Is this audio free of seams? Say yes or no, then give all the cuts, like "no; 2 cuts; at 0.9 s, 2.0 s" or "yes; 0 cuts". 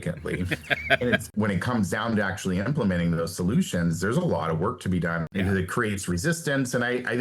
no; 2 cuts; at 1.3 s, 5.3 s